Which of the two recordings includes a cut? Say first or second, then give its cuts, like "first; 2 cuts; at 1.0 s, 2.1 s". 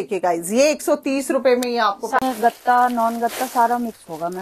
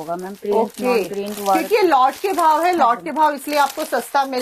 first; 1 cut; at 2.2 s